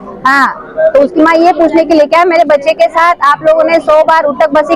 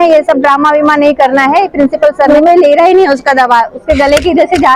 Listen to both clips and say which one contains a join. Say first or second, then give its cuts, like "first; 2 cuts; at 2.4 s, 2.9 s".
second; 1 cut; at 2.3 s